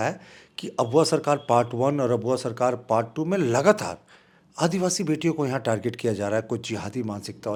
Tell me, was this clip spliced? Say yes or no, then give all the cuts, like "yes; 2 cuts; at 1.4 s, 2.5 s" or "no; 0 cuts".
no; 0 cuts